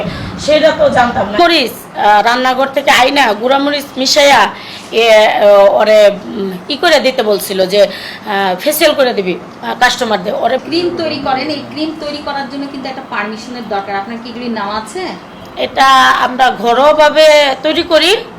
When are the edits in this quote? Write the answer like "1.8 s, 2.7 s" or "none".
1.3 s, 10.6 s